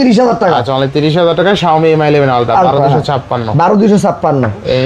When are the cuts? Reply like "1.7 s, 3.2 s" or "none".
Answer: none

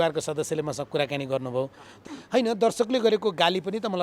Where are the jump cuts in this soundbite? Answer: 2.0 s

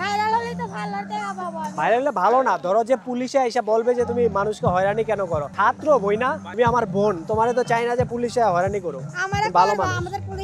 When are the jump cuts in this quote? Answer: none

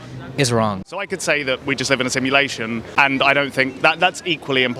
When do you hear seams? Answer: 1.1 s, 2.9 s

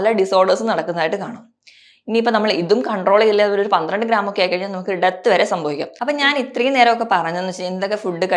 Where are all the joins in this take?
5.9 s

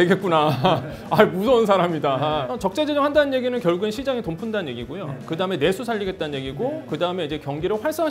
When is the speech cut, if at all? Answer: 2.5 s

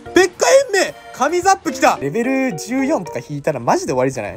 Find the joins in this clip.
2.0 s

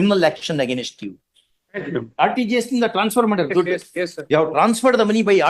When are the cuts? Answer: 1.9 s, 4.2 s

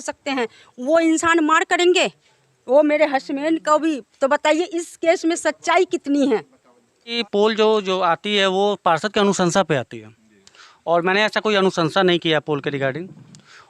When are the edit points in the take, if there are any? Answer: 7.2 s

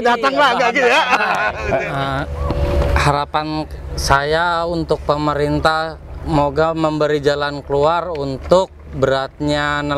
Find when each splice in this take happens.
1.6 s

